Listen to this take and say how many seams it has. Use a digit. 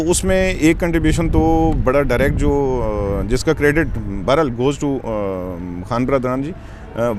0